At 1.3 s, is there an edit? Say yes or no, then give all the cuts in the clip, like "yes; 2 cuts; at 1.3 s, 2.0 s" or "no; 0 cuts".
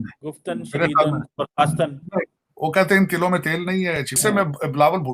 no; 1 cut; at 4.1 s